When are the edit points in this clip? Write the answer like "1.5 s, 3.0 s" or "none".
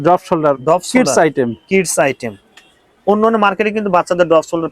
none